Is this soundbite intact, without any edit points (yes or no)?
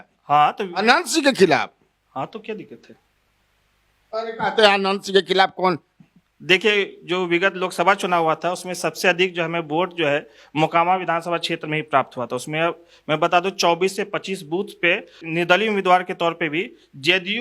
yes